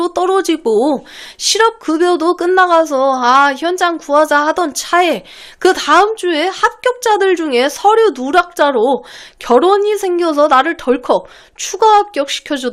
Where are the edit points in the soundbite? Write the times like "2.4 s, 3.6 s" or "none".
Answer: none